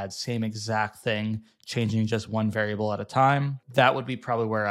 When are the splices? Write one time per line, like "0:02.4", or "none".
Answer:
0:03.6